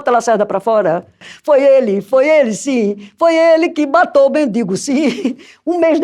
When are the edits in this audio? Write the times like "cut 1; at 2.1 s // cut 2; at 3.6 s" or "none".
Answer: cut 1; at 1.3 s